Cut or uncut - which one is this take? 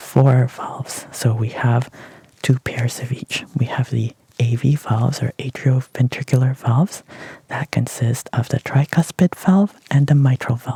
uncut